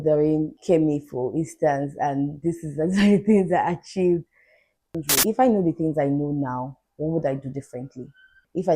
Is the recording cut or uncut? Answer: cut